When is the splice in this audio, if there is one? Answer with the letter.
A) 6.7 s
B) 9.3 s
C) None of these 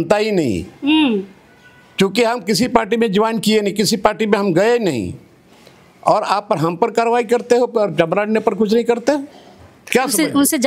C